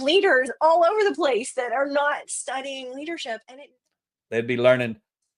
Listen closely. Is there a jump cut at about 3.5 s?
yes; 1 cut; at 3.5 s

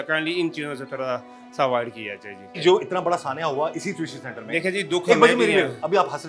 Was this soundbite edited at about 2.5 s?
yes; 1 cut; at 2.5 s

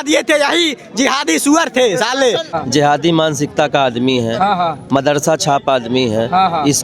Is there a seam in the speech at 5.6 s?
no; 1 cut; at 2.5 s

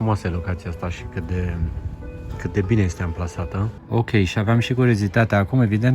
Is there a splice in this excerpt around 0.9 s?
no; 1 cut; at 3.8 s

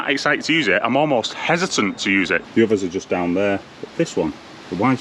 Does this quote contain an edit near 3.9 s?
no; 1 cut; at 2.4 s

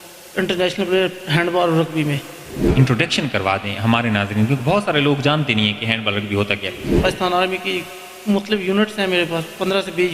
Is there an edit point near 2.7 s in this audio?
yes; 2 cuts; at 2.7 s, 6.9 s

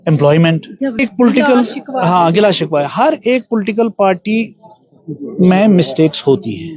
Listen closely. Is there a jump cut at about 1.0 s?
yes; 1 cut; at 1.0 s

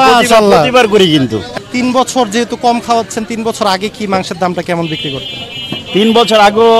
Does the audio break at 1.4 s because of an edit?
yes; 1 cut; at 1.4 s

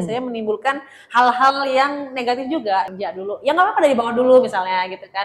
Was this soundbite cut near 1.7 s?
no; 1 cut; at 2.9 s

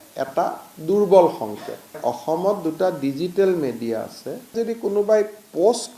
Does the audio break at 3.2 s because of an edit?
no; 2 cuts; at 2.0 s, 4.5 s

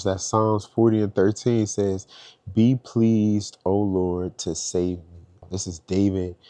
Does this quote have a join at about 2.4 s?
no; 1 cut; at 5.4 s

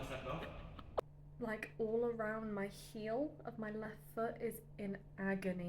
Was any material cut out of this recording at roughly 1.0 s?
yes; 1 cut; at 1.0 s

